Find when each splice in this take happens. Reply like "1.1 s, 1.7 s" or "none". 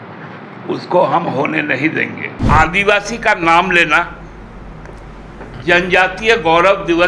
2.5 s